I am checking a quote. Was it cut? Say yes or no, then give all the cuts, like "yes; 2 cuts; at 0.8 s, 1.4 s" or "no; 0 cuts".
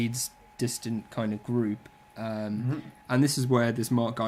no; 0 cuts